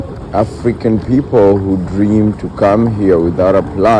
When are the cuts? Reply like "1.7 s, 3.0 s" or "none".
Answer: none

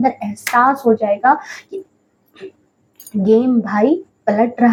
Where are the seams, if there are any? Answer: none

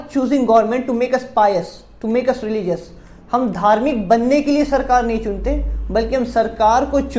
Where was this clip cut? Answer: none

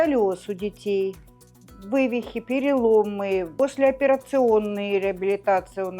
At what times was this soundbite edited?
3.5 s

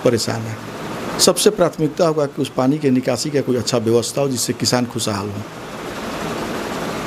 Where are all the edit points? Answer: none

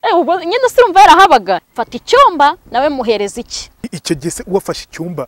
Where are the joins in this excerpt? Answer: 1.6 s

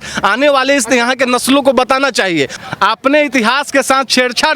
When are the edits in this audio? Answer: 2.6 s

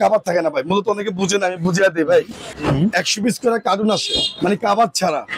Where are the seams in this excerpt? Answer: 2.5 s

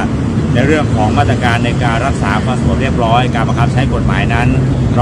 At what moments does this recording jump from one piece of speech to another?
none

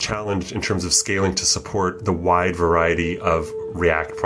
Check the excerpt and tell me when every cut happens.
none

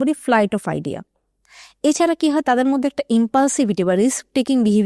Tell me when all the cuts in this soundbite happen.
none

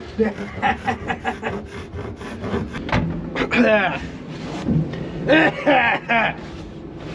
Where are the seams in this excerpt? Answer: 2.8 s

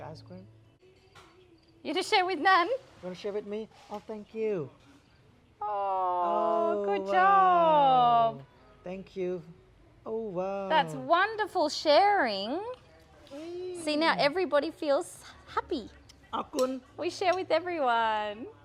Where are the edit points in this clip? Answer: none

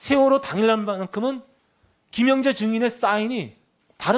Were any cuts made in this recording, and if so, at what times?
2.9 s

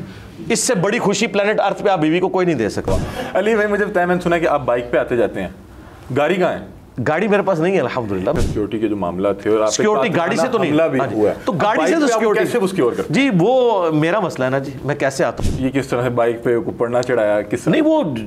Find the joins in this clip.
2.9 s, 8.3 s, 15.4 s

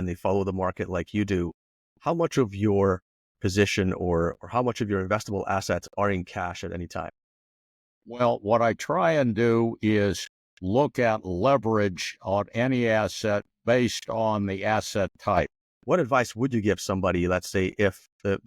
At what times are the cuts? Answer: 15.7 s

